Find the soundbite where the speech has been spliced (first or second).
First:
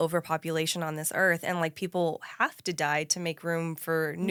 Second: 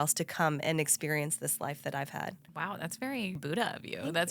second